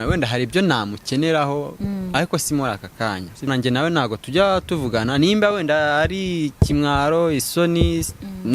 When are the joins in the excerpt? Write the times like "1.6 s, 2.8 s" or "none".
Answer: 3.5 s